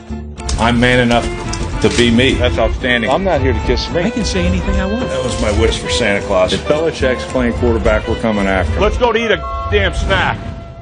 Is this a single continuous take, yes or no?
no